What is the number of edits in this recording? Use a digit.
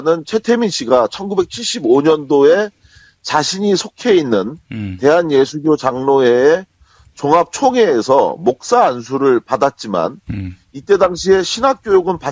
1